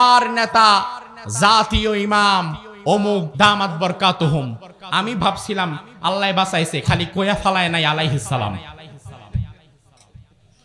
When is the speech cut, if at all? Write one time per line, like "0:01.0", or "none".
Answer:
0:03.3